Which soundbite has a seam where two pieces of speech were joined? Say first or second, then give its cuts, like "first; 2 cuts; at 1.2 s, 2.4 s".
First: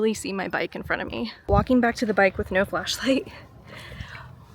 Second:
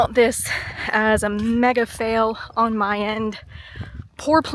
first; 1 cut; at 1.5 s